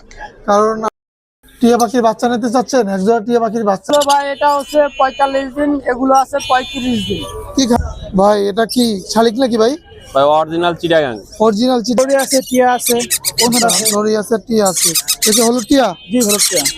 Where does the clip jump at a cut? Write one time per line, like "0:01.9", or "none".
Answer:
0:00.9
0:03.9
0:07.8
0:12.0